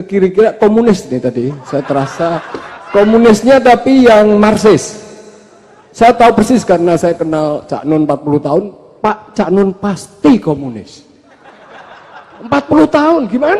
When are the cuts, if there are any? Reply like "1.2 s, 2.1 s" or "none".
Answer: none